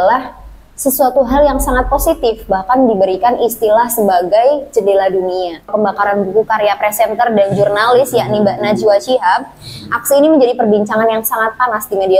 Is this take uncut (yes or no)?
no